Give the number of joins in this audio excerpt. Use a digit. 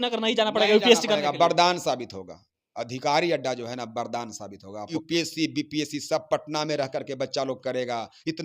1